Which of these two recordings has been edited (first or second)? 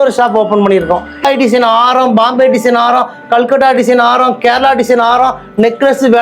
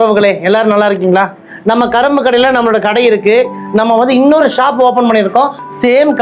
first